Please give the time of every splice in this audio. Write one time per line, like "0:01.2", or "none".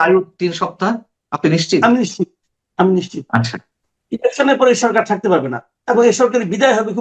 none